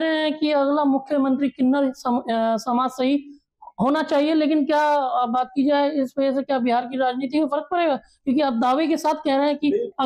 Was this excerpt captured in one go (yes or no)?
yes